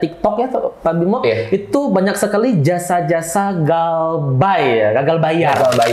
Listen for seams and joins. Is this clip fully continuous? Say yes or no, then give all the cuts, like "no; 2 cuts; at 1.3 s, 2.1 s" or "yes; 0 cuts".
yes; 0 cuts